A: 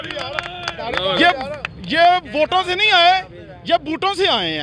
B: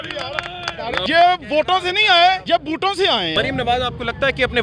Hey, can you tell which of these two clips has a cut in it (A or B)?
B